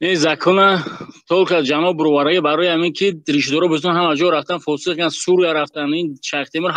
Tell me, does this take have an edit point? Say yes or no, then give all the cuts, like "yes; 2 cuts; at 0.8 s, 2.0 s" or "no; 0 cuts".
no; 0 cuts